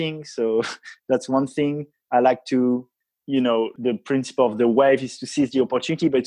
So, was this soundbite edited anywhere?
yes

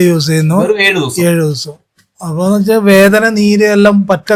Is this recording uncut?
yes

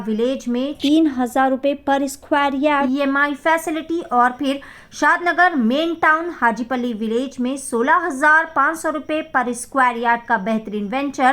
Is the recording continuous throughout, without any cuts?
yes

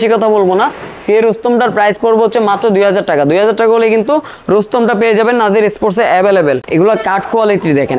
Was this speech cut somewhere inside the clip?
yes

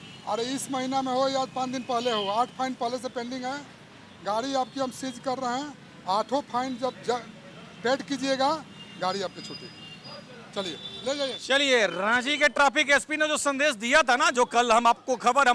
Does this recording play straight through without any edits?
yes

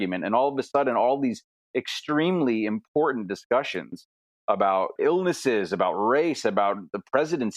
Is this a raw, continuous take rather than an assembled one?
no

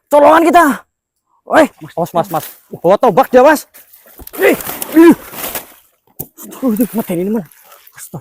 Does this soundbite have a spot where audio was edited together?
yes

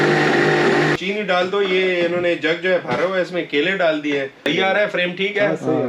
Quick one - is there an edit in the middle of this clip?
yes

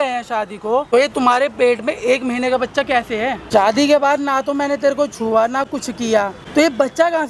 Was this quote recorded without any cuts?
no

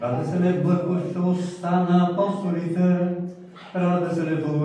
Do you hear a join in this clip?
no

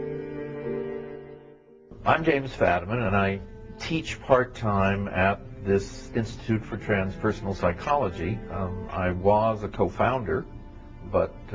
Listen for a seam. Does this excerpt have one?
yes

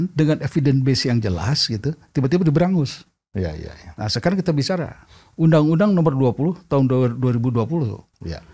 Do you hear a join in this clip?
no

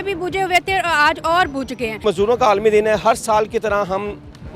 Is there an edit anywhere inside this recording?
yes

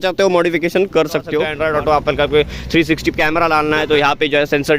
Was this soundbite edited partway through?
yes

